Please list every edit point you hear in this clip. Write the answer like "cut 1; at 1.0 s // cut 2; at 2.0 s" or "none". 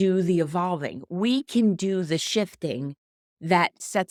none